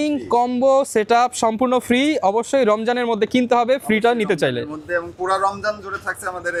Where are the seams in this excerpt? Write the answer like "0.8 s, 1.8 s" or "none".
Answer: none

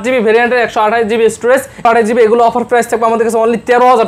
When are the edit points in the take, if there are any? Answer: 1.8 s

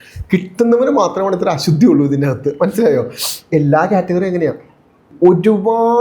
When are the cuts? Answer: 5.1 s

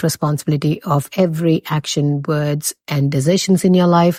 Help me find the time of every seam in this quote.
none

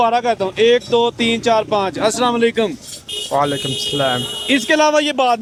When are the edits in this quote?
none

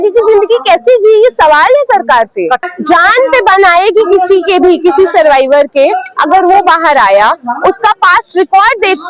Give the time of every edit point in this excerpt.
2.6 s

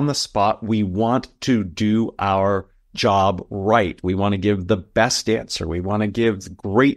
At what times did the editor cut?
none

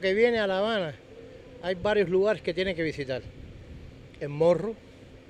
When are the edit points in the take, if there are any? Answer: none

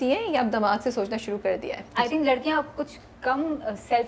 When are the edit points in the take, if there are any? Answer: 1.8 s

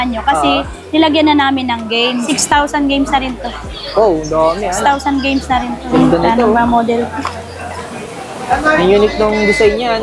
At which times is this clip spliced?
2.3 s, 5.9 s

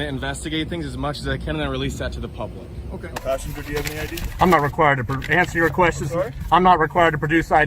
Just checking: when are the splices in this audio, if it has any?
3.2 s

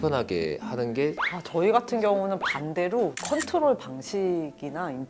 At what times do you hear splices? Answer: 1.2 s, 3.3 s

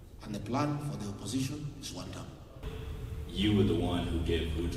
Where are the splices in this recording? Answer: 2.5 s

